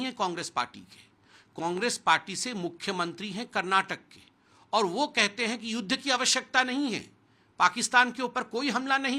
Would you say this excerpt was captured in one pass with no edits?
yes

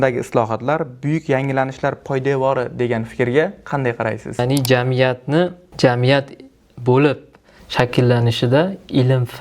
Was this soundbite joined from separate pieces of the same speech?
yes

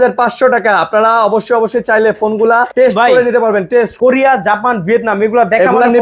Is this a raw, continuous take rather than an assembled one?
no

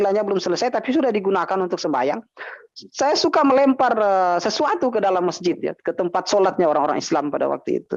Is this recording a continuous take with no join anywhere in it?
yes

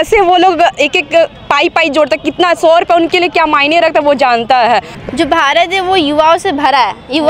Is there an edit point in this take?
yes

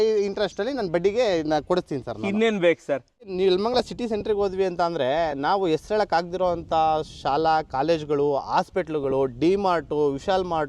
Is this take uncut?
no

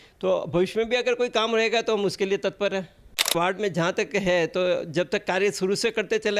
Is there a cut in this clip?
yes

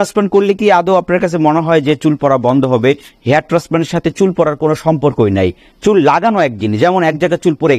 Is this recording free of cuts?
yes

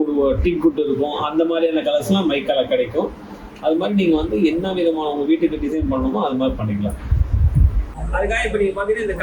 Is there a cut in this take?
yes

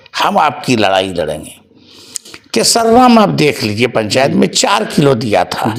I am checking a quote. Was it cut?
no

